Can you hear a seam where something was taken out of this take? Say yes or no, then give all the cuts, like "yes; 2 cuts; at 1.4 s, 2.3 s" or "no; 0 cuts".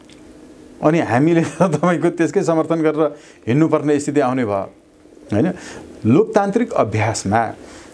no; 0 cuts